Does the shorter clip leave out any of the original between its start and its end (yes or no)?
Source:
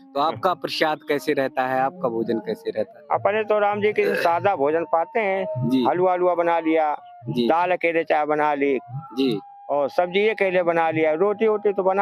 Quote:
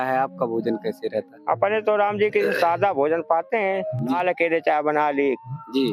yes